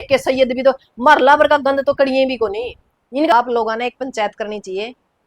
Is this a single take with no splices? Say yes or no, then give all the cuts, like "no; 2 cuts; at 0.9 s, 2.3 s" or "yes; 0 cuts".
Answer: no; 1 cut; at 3.3 s